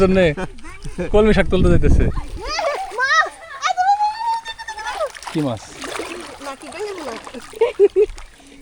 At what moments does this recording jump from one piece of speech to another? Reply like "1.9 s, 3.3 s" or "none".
2.2 s